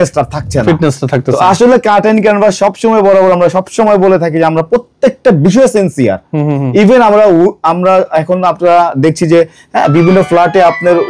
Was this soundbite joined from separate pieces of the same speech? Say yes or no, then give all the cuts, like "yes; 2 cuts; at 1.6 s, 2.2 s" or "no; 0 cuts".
no; 0 cuts